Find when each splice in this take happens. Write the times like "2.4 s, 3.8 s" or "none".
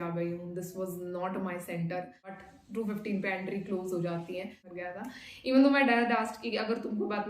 2.5 s, 5.0 s